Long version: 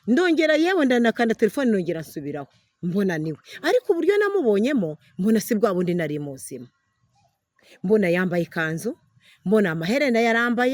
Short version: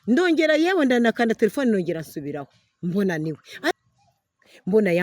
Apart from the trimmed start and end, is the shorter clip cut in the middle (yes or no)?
yes